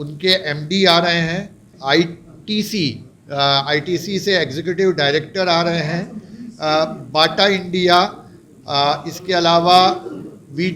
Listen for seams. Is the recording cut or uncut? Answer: cut